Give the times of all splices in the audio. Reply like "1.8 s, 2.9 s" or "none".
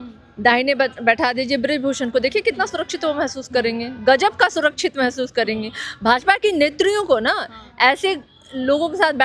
none